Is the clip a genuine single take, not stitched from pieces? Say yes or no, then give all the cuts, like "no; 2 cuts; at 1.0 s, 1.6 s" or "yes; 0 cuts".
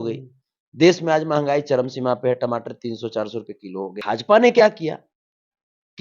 no; 1 cut; at 4.0 s